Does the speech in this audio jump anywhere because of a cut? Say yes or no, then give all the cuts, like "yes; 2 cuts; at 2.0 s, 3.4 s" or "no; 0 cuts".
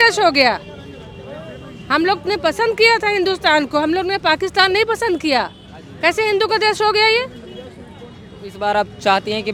no; 0 cuts